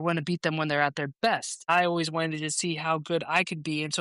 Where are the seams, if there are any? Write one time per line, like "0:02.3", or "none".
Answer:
0:01.6